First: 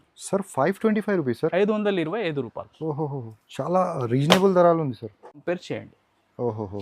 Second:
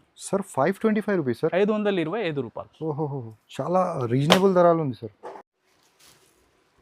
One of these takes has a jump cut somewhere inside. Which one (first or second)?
first